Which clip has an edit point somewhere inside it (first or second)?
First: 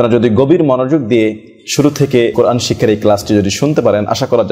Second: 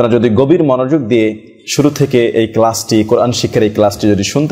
first